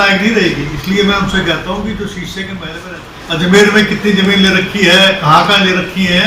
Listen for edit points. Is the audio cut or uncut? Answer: cut